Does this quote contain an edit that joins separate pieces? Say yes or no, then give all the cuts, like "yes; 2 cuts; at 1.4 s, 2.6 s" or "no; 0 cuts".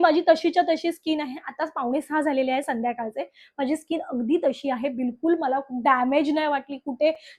no; 0 cuts